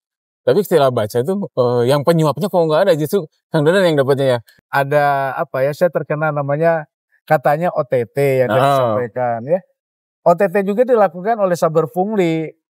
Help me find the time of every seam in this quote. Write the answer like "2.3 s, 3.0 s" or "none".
4.5 s